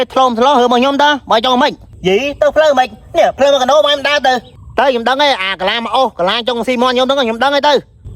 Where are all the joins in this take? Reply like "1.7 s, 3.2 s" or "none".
1.9 s